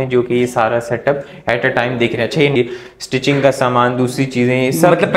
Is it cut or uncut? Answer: cut